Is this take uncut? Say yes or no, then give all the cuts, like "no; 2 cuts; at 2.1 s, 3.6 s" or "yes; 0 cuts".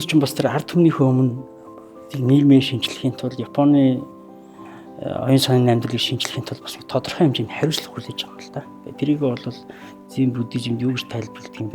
yes; 0 cuts